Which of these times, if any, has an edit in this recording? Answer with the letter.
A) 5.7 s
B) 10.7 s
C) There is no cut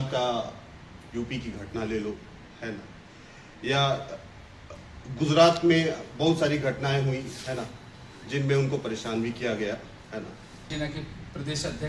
B